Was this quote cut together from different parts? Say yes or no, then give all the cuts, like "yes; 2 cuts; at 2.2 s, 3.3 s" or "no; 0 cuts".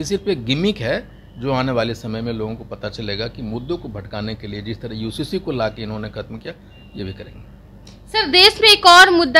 no; 0 cuts